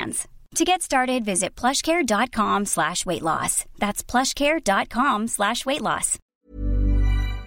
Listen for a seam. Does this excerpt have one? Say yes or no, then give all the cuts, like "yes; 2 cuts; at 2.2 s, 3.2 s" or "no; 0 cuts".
yes; 1 cut; at 6.3 s